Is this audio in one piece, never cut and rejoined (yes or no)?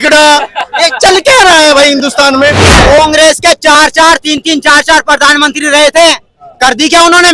no